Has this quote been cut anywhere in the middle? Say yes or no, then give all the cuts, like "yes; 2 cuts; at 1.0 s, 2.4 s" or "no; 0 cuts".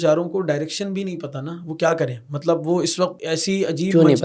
yes; 1 cut; at 3.2 s